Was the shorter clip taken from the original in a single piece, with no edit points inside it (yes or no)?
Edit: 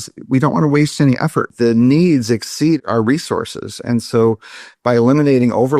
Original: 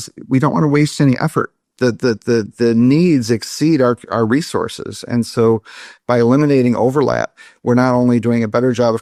no